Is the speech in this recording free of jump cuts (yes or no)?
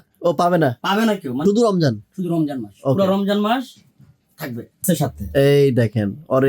no